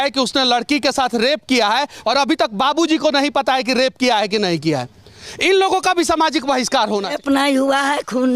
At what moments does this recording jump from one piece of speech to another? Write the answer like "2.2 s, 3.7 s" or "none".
2.0 s, 7.1 s